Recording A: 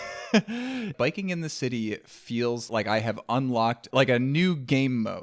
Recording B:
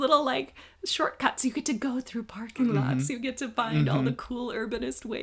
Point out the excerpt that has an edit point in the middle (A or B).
A